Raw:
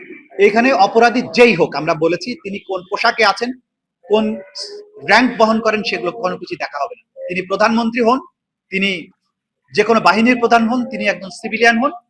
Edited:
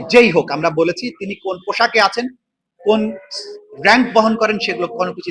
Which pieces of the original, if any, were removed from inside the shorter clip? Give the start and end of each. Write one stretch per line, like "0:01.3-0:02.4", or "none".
none